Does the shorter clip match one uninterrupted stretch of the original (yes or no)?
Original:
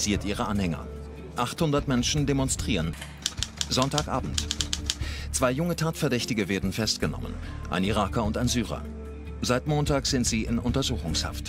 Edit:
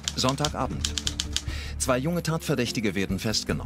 yes